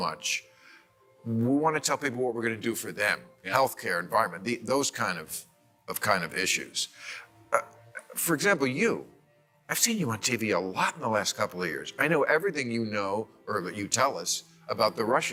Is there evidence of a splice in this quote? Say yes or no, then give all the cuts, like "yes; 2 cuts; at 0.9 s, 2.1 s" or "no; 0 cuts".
no; 0 cuts